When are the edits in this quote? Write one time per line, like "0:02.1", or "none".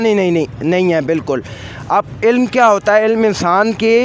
none